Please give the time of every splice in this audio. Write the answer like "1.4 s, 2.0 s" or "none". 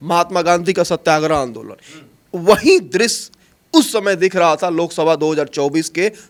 none